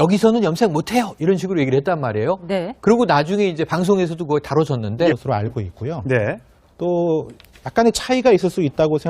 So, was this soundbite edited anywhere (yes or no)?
no